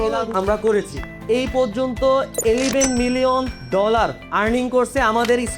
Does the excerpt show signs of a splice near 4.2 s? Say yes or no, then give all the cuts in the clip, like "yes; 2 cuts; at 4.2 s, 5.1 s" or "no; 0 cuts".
no; 1 cut; at 1.1 s